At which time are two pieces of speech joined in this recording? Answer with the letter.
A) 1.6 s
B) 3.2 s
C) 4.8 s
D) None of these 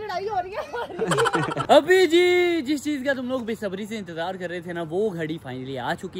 A